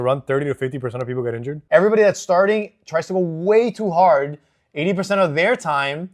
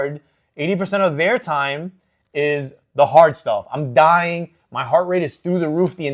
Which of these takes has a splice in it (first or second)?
first